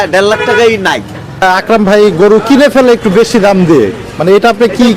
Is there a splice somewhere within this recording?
yes; 1 cut; at 1.4 s

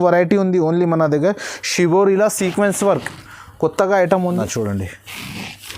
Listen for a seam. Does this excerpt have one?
yes; 1 cut; at 4.3 s

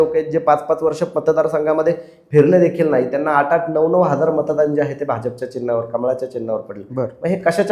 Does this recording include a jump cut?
no; 0 cuts

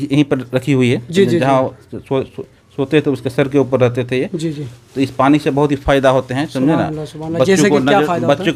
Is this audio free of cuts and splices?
yes; 0 cuts

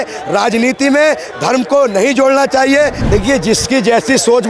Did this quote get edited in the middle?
yes; 1 cut; at 3.0 s

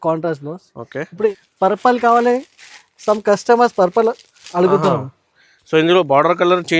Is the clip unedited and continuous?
no; 1 cut; at 1.3 s

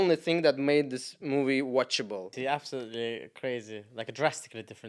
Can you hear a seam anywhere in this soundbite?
yes; 1 cut; at 2.4 s

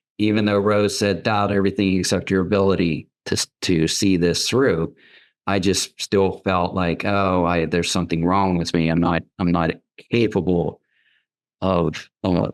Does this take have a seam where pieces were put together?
no; 0 cuts

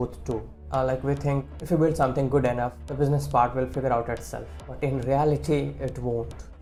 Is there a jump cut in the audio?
no; 0 cuts

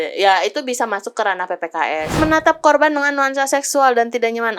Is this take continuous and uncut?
no; 1 cut; at 2.2 s

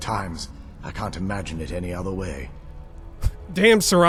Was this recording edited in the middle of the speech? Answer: no; 0 cuts

